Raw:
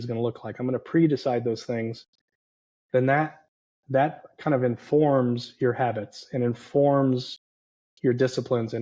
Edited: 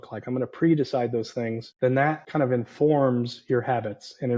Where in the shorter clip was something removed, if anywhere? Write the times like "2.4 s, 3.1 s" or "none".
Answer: 1.7 s, 2.2 s